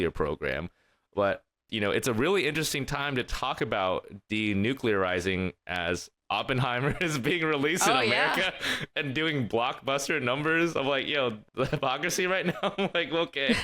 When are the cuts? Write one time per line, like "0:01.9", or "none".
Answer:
none